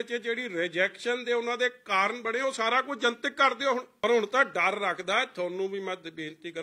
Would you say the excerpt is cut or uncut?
cut